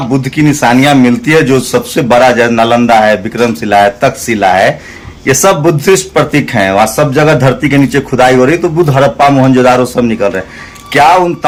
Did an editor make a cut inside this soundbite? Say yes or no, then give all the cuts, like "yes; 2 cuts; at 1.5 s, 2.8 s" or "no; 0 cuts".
no; 0 cuts